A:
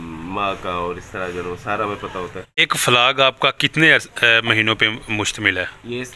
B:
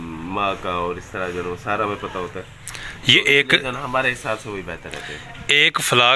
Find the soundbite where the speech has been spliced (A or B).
A